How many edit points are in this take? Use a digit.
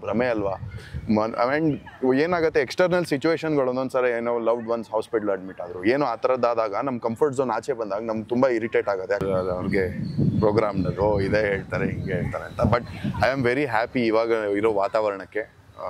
1